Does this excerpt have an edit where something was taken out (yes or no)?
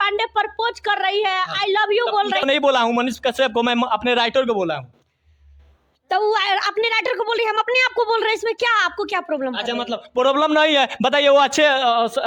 no